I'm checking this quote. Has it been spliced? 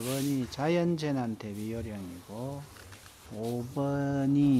yes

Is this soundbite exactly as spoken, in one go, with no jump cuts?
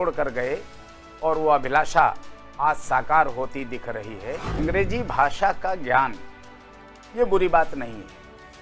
no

